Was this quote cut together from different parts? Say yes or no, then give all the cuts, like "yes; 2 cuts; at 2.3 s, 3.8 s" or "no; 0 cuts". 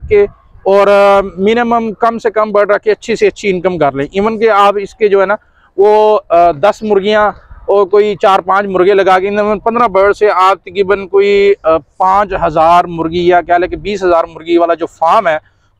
no; 0 cuts